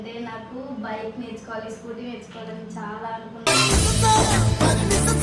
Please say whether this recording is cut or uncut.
uncut